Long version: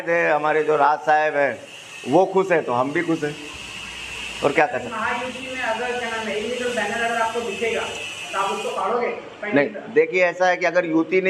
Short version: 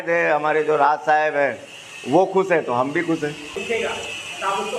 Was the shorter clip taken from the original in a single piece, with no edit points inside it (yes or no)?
no